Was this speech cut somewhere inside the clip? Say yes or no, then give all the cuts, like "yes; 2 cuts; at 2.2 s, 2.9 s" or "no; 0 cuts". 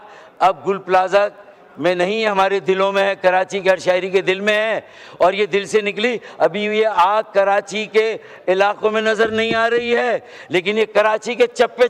no; 0 cuts